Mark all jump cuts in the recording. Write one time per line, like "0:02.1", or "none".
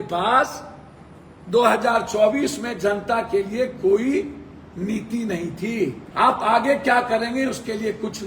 0:06.0